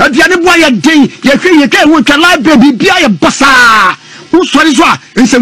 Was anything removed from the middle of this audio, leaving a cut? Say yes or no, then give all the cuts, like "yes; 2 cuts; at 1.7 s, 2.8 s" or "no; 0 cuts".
no; 0 cuts